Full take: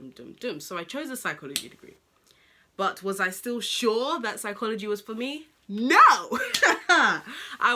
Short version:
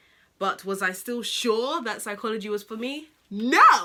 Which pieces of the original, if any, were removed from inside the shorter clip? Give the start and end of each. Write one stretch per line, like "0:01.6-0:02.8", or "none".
none